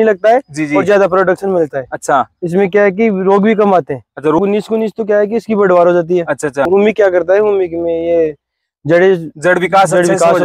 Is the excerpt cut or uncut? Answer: cut